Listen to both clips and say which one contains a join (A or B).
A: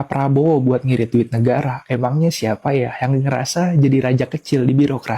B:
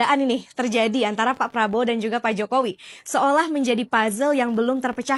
A